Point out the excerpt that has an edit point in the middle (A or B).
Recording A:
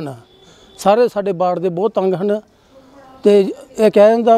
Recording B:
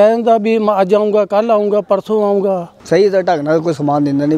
B